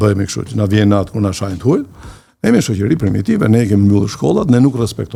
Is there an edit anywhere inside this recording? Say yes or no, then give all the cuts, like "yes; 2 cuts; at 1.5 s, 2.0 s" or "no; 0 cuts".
no; 0 cuts